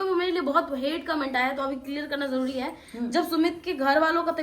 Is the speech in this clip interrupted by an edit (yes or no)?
no